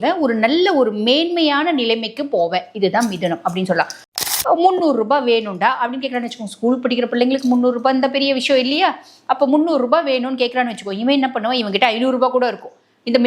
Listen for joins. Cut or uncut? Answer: cut